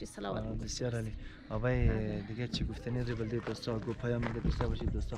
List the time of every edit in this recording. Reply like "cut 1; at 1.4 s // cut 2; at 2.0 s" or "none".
none